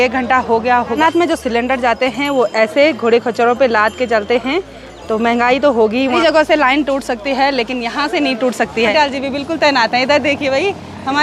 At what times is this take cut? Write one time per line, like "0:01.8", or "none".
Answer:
0:01.0
0:06.2
0:08.9